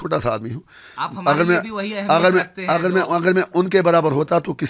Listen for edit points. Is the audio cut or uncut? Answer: uncut